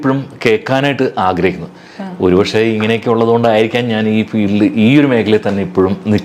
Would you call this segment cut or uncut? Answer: uncut